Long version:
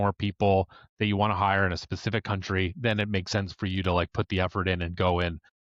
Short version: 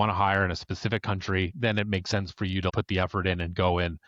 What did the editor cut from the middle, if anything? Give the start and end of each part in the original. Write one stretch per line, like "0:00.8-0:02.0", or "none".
0:03.9-0:04.1